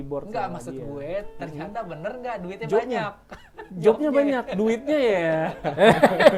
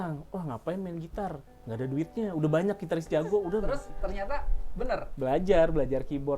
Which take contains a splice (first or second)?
second